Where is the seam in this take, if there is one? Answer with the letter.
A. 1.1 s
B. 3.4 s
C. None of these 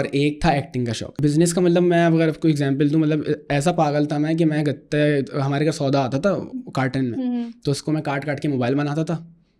A